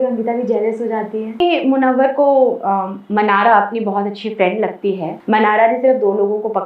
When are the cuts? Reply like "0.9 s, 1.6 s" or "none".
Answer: 1.4 s, 5.1 s